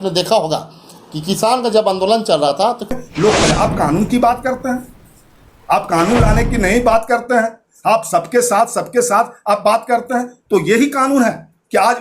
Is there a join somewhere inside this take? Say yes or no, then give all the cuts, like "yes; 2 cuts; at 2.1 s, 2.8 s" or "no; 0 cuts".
yes; 1 cut; at 2.9 s